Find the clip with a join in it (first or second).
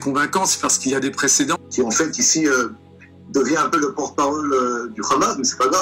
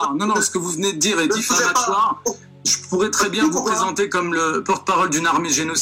first